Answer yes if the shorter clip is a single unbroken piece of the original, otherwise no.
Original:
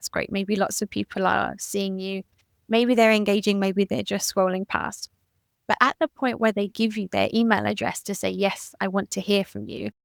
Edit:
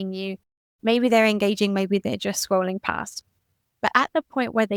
yes